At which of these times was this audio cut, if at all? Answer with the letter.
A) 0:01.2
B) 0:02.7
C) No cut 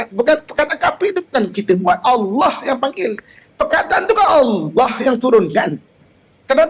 C